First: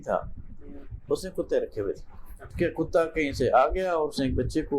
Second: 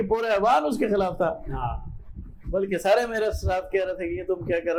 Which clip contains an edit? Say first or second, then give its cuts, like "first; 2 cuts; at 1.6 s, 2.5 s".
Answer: first; 1 cut; at 2.5 s